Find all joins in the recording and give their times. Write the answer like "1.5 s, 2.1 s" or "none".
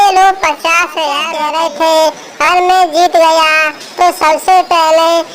1.2 s